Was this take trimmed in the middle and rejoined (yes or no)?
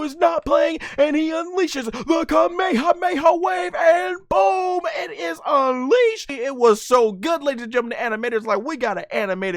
yes